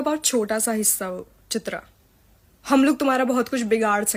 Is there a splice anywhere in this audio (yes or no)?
no